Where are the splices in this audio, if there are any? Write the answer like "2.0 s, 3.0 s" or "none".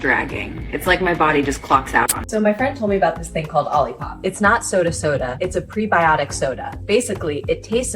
2.2 s